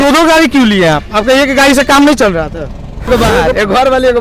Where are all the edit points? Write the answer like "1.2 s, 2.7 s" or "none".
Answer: 3.1 s

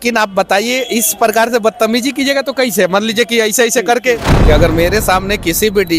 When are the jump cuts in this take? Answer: 4.3 s

